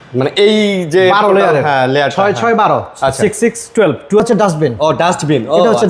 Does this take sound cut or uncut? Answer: cut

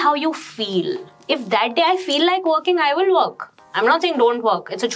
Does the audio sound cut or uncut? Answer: uncut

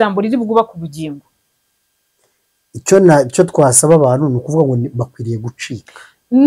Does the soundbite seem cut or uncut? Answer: uncut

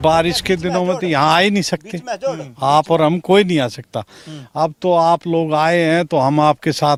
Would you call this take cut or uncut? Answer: uncut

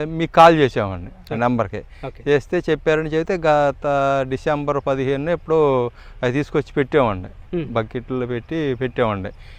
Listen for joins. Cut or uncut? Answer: uncut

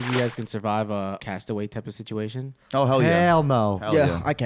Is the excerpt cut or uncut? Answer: cut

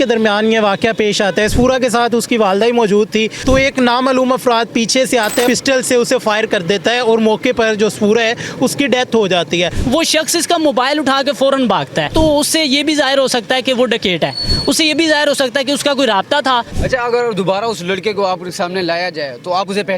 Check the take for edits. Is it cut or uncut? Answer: cut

